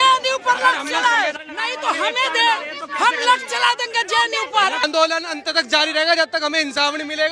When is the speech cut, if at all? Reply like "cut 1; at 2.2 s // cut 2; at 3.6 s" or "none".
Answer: cut 1; at 1.4 s // cut 2; at 4.8 s